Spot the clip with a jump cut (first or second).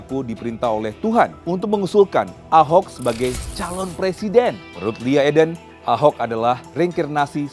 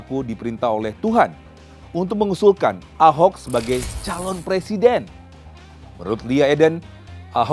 first